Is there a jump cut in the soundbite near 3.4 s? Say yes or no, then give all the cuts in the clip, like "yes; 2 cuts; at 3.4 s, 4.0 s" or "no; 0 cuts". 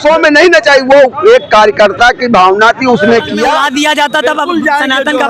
yes; 1 cut; at 3.4 s